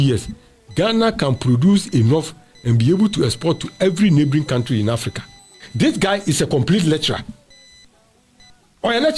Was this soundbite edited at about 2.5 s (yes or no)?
no